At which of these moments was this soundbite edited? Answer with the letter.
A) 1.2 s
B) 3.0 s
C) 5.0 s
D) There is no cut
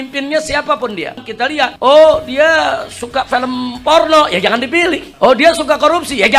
A